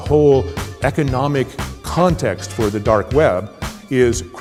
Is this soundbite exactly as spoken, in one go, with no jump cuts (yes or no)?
yes